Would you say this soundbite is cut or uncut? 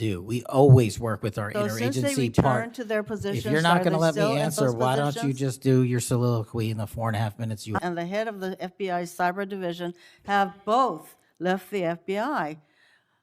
cut